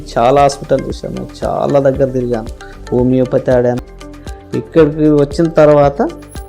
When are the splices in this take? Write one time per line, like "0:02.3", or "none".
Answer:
0:03.8